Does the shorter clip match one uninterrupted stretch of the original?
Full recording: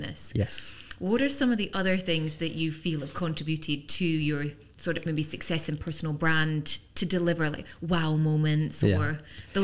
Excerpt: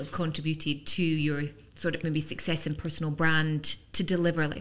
yes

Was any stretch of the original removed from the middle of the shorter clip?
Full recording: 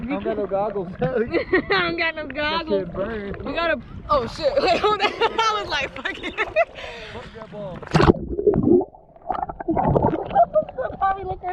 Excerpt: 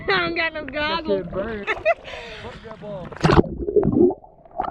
yes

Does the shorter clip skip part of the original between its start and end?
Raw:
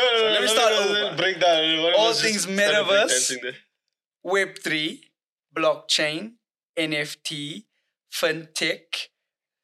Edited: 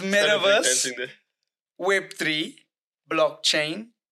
no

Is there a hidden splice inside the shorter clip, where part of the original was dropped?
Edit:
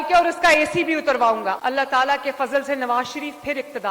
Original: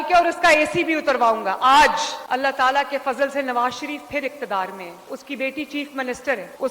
yes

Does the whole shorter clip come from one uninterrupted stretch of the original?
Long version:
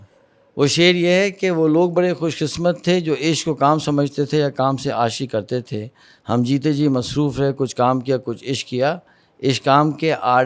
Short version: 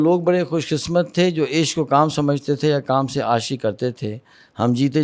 yes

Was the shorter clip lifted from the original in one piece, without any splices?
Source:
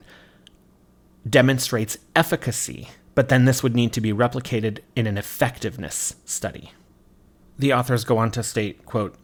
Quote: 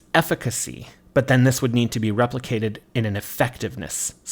yes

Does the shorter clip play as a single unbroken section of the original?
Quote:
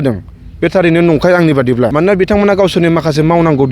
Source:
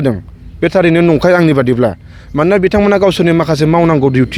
no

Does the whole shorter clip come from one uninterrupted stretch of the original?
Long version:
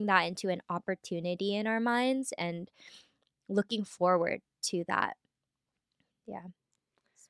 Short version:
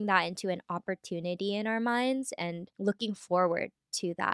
no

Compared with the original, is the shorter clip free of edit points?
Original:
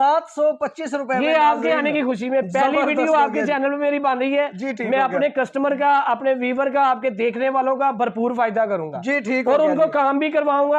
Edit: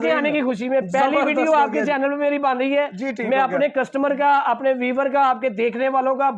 yes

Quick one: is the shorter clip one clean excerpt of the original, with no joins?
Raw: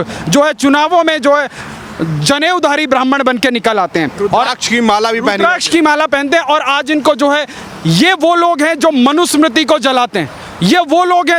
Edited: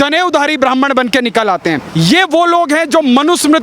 no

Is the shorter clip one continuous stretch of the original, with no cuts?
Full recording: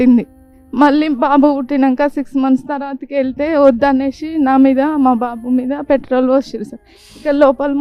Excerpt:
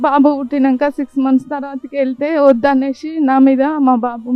yes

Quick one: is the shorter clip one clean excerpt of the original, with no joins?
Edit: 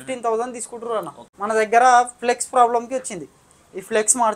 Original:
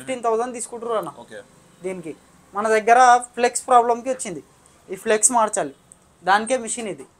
no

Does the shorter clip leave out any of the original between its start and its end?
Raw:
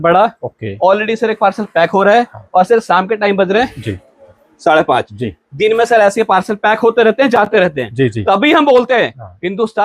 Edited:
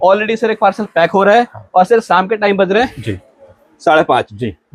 no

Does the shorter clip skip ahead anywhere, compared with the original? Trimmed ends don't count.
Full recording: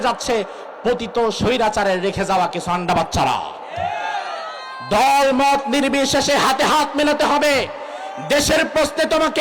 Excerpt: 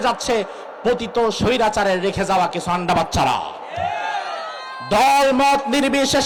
no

